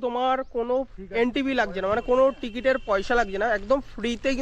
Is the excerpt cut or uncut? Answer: uncut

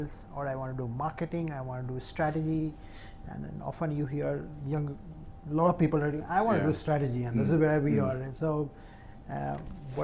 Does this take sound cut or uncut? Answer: uncut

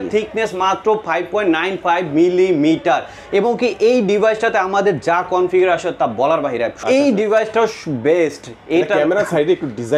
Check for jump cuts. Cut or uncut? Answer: cut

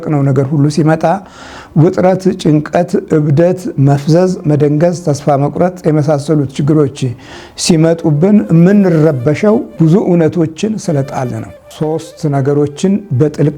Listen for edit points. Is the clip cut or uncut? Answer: cut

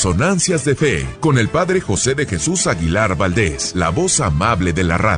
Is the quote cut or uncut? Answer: cut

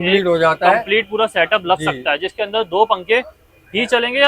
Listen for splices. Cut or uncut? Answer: uncut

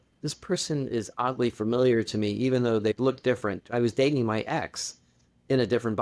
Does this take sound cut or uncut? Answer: cut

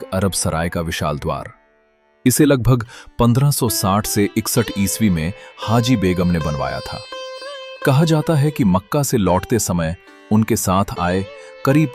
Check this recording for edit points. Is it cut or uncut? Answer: uncut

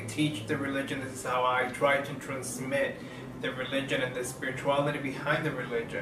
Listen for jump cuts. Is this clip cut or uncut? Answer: cut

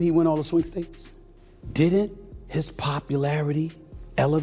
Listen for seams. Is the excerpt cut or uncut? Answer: uncut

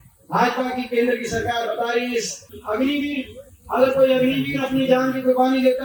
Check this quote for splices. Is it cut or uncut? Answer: uncut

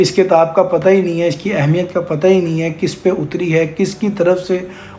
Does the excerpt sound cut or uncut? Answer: uncut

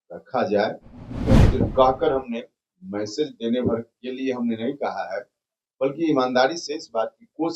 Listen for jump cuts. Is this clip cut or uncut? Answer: cut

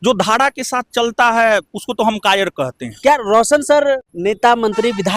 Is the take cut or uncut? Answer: cut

